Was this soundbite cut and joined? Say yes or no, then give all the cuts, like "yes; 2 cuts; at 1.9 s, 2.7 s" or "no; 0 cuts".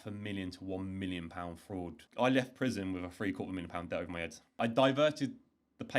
yes; 2 cuts; at 2.0 s, 4.6 s